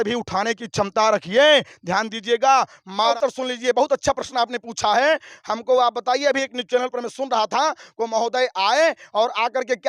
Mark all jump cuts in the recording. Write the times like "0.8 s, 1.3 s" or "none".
3.1 s